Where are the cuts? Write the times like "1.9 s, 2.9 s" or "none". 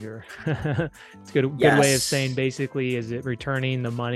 none